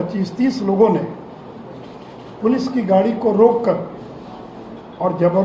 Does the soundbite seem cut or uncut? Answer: uncut